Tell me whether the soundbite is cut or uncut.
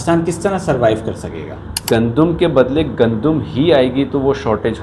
cut